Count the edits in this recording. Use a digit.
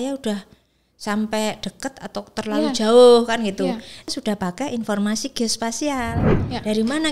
2